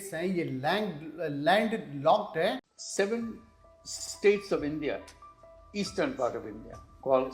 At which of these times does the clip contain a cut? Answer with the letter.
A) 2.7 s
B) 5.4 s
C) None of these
A